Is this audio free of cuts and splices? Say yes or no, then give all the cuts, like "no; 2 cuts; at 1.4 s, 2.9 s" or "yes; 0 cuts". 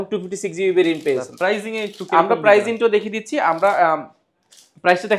yes; 0 cuts